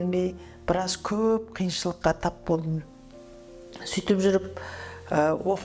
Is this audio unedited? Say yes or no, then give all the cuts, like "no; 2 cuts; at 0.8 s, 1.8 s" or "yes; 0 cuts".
yes; 0 cuts